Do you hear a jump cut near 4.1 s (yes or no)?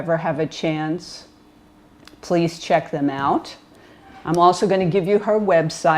no